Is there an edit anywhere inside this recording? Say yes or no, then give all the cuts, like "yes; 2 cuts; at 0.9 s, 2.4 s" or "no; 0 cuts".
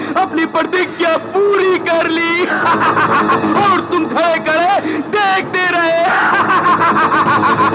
no; 0 cuts